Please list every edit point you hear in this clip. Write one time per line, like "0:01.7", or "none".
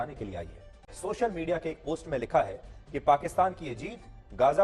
0:00.9